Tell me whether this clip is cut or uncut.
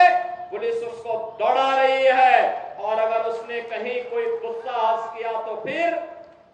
uncut